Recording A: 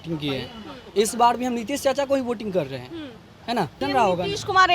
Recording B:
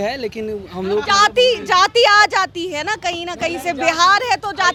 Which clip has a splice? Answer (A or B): A